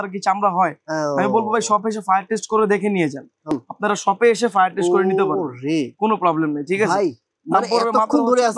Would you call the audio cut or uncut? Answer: cut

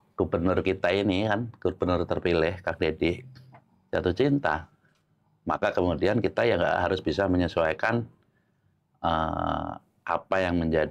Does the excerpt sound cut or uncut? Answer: uncut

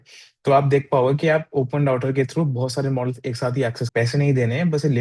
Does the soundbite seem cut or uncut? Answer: cut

